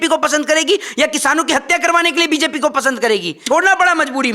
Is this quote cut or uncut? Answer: cut